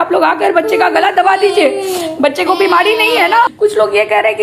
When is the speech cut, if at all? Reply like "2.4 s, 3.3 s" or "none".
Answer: 3.5 s

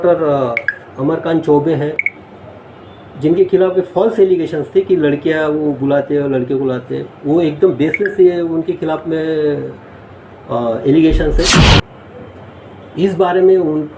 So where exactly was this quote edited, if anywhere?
11.8 s

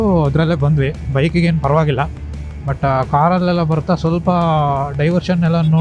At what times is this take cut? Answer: none

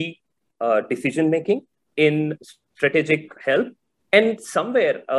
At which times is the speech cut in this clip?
2.1 s, 3.3 s

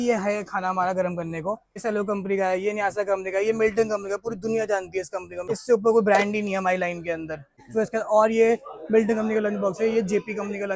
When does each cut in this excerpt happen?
1.8 s, 5.5 s, 7.2 s

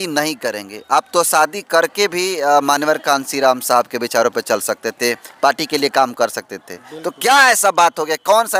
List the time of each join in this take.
none

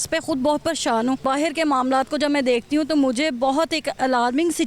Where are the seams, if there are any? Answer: 1.2 s

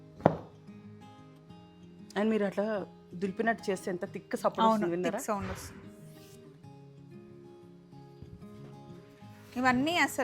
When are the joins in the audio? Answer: none

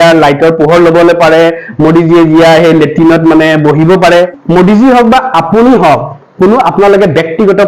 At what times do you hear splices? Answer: 4.4 s

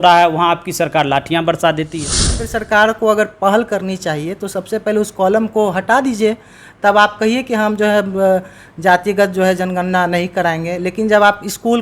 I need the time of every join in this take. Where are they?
2.4 s

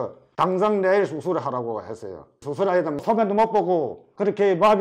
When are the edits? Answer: none

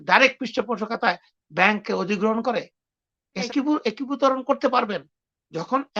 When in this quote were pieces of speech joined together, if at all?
3.5 s

